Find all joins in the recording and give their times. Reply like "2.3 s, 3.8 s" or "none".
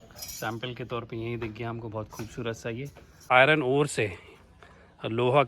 3.2 s